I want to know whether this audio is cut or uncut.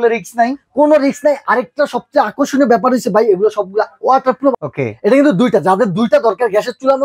cut